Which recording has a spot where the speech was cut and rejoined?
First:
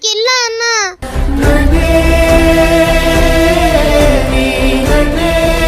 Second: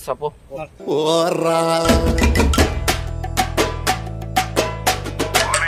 first; 1 cut; at 0.9 s

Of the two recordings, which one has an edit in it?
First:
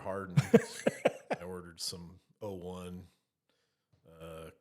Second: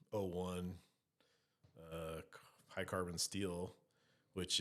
first; 1 cut; at 1.3 s

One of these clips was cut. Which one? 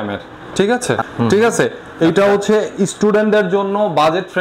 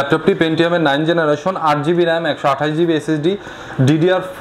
first; 1 cut; at 1.1 s

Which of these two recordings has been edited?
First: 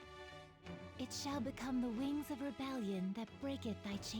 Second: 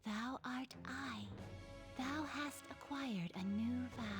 first; 1 cut; at 0.9 s

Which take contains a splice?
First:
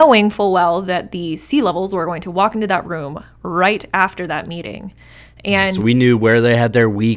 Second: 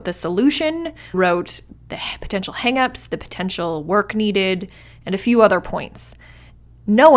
second; 1 cut; at 1.1 s

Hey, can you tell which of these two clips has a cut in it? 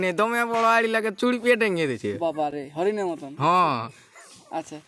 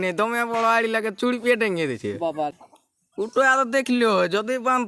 second; 1 cut; at 2.6 s

